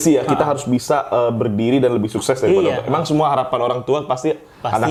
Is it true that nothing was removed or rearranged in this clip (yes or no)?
yes